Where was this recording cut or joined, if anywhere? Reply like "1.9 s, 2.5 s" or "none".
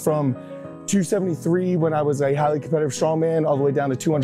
none